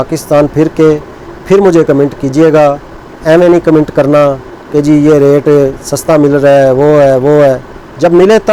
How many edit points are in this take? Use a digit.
0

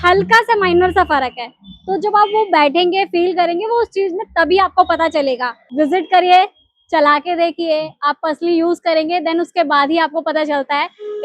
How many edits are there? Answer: 1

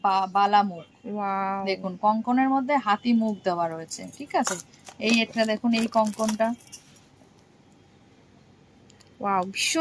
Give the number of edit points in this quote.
0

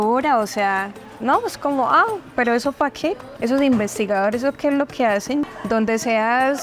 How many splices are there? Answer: 2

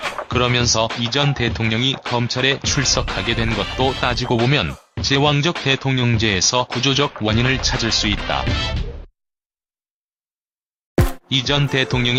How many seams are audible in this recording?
0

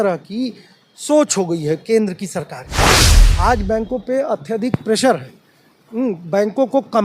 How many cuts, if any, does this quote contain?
1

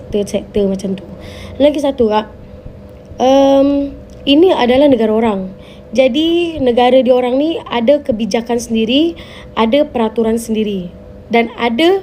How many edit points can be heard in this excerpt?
0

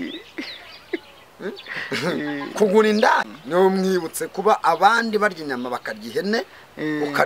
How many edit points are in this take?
1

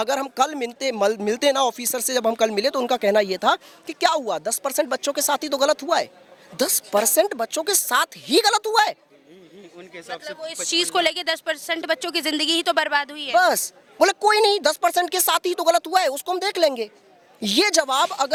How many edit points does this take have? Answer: 0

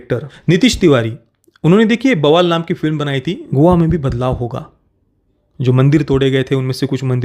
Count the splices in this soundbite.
1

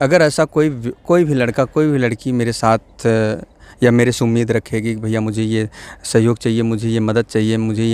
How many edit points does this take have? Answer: 0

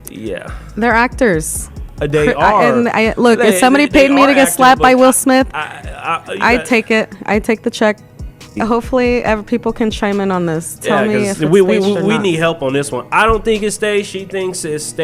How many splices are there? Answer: 1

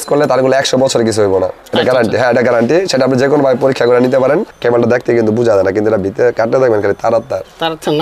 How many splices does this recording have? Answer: 2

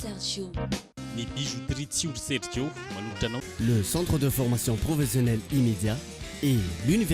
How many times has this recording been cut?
1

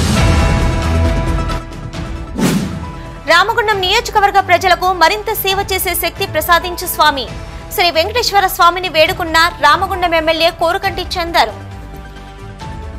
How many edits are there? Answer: 1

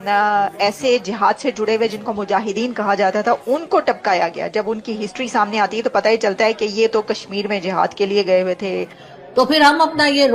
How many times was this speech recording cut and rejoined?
1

